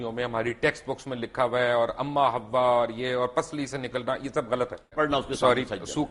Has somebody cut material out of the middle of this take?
yes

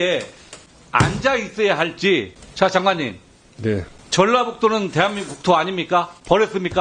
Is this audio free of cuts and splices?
no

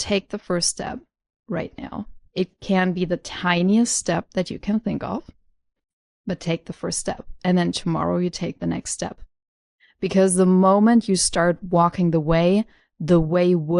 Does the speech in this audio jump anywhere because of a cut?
yes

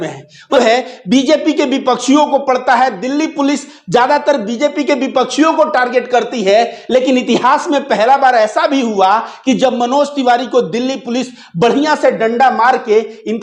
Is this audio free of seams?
yes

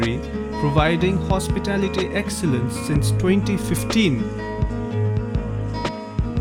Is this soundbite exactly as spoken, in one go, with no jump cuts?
yes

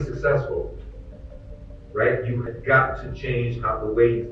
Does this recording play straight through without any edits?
no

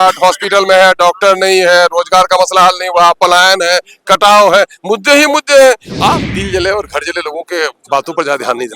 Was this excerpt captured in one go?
no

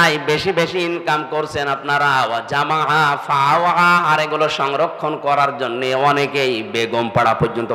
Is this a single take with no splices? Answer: yes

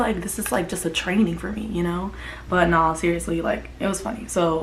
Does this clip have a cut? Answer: no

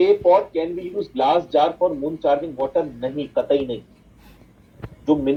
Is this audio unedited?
yes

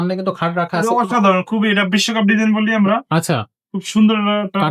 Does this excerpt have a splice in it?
no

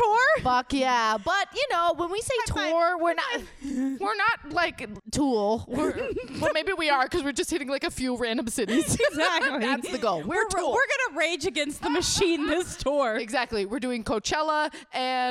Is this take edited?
no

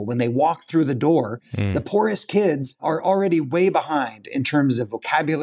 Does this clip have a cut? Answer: no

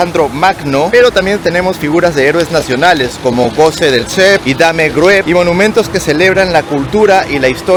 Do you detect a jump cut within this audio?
no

